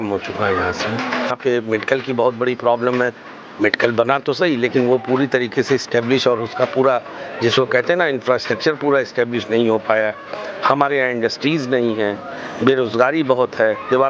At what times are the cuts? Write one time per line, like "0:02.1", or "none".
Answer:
0:01.3